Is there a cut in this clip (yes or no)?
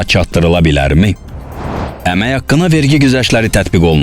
yes